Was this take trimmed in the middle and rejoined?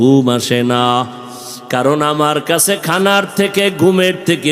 no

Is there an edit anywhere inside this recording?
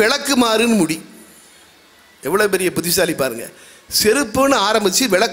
no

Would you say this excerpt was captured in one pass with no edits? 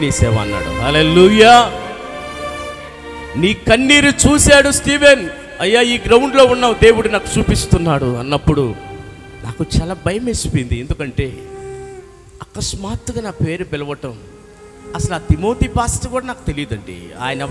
yes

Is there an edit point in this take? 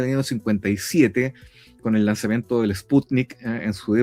no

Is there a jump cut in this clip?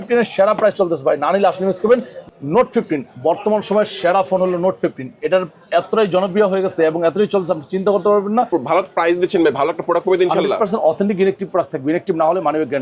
yes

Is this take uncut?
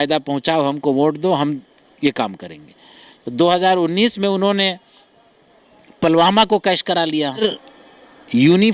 no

